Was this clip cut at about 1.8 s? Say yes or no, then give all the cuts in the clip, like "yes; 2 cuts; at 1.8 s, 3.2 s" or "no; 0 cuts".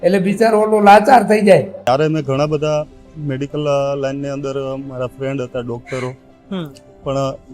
yes; 1 cut; at 1.8 s